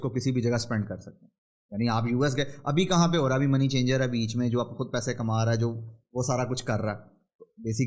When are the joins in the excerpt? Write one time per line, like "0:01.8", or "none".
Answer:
none